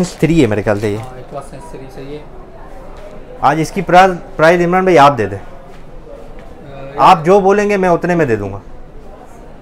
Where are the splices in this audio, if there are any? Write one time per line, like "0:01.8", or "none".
none